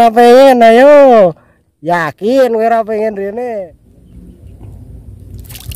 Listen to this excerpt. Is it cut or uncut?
cut